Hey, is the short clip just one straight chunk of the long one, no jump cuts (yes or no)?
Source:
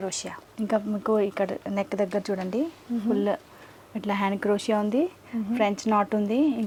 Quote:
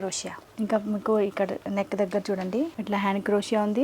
no